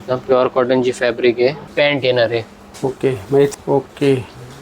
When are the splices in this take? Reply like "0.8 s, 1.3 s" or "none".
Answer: 1.6 s, 3.5 s